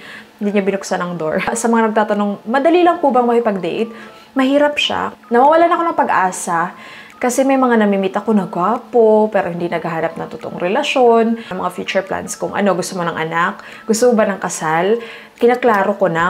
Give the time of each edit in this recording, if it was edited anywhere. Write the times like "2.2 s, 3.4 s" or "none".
1.5 s, 5.1 s, 11.5 s